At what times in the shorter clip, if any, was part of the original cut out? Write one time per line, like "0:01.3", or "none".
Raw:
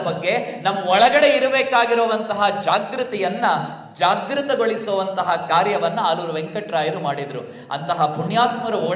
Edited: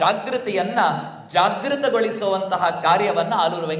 none